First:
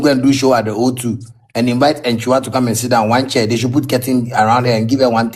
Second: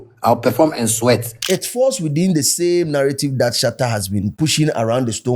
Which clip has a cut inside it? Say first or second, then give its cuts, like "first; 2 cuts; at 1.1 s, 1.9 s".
second; 2 cuts; at 1.4 s, 4.3 s